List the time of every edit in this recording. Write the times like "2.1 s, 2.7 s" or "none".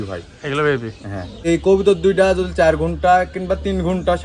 1.5 s

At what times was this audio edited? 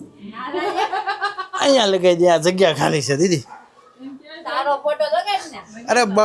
none

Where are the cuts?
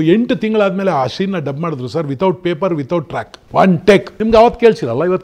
3.4 s, 4.1 s

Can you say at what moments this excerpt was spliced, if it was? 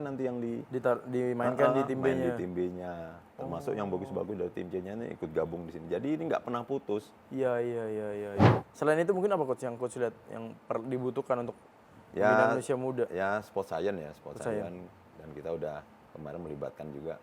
8.5 s

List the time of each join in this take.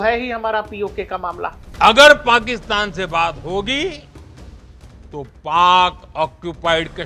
1.6 s

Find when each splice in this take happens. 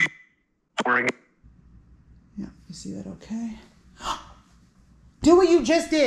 1.3 s

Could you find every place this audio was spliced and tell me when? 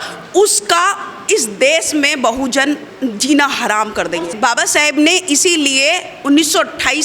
4.3 s

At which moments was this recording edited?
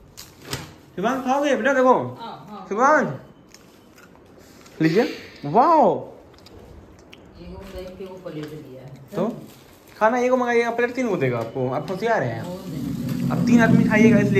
none

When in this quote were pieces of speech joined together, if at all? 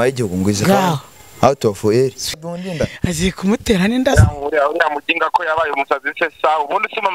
2.3 s

